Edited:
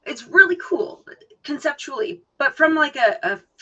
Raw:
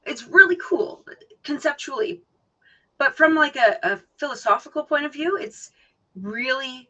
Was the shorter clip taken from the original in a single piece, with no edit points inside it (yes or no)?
no